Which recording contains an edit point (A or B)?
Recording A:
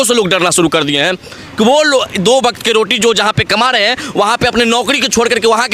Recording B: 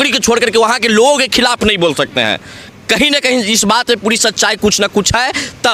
A